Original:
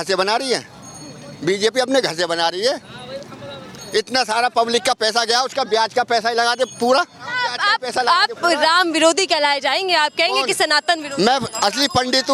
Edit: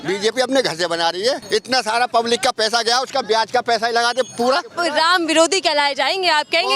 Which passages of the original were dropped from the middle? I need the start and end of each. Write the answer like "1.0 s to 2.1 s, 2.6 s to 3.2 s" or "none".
2.8 s to 3.9 s, 7.1 s to 8.4 s